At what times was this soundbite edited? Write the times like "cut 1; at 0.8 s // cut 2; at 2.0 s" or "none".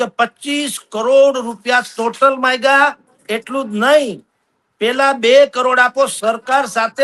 none